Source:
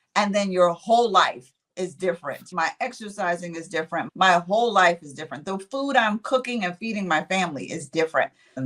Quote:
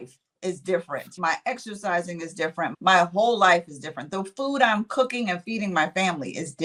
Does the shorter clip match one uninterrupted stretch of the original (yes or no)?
yes